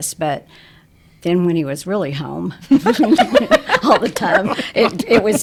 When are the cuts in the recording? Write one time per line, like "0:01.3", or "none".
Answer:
none